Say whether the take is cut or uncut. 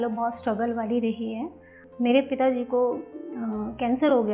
cut